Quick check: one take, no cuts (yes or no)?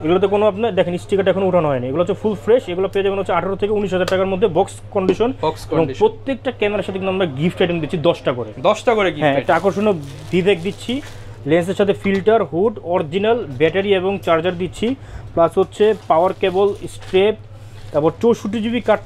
yes